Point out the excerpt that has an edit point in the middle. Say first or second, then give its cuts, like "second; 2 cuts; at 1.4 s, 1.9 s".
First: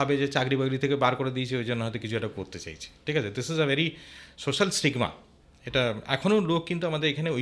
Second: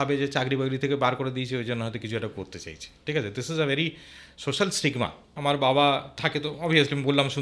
second; 1 cut; at 5.3 s